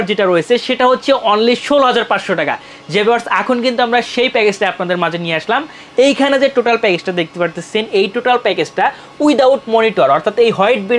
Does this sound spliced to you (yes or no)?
no